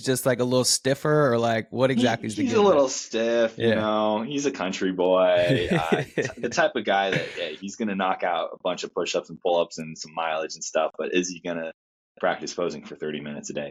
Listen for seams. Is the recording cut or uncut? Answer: uncut